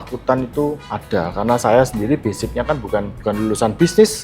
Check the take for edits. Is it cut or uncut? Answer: cut